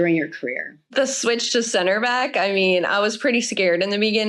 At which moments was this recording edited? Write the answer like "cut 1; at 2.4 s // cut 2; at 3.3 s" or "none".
cut 1; at 0.9 s